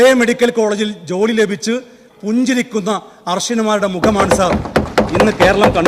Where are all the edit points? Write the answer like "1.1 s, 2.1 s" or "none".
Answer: none